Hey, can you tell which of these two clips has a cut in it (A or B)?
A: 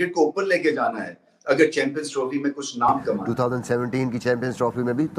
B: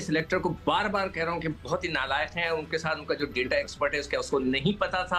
A